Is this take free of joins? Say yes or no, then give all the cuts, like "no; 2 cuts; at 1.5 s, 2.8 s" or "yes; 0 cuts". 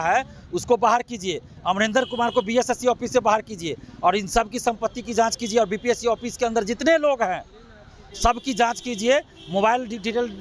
yes; 0 cuts